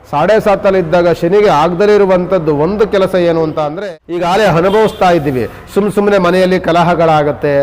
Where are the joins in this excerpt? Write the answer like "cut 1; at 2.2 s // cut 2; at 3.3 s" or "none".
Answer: cut 1; at 3.7 s

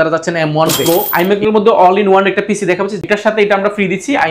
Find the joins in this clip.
cut 1; at 1.1 s // cut 2; at 3.1 s

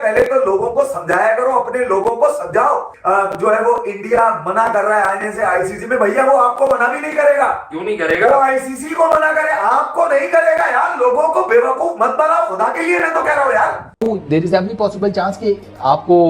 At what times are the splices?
cut 1; at 2.9 s // cut 2; at 13.9 s

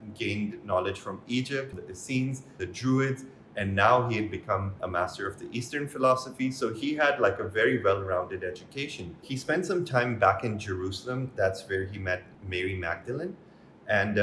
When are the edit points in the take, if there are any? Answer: cut 1; at 1.7 s // cut 2; at 2.6 s // cut 3; at 4.8 s // cut 4; at 9.2 s

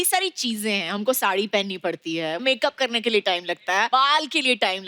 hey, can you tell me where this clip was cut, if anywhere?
cut 1; at 2.4 s // cut 2; at 3.9 s

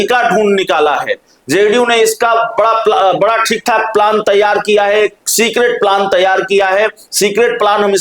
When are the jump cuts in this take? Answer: none

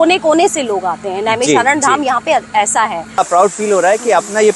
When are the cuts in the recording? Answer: cut 1; at 3.2 s

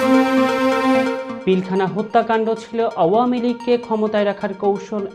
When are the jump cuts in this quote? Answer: cut 1; at 1.3 s

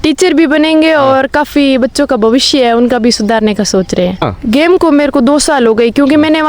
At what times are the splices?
cut 1; at 4.2 s

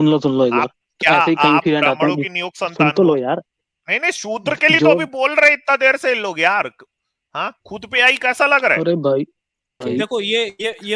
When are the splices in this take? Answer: cut 1; at 9.8 s

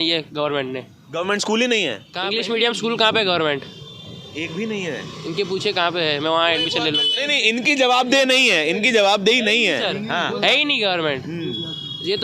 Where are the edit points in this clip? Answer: cut 1; at 2.1 s

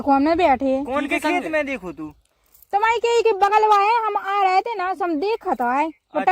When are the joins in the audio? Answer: none

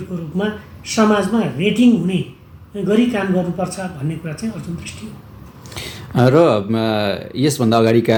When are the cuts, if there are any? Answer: none

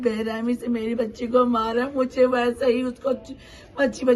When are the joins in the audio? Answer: none

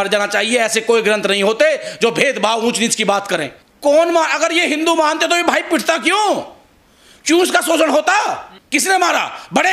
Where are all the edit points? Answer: cut 1; at 3.6 s // cut 2; at 8.5 s

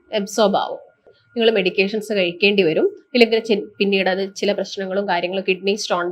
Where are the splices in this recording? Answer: cut 1; at 1.2 s

